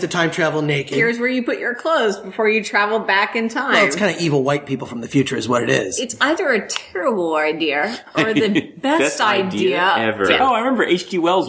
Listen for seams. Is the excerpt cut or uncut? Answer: cut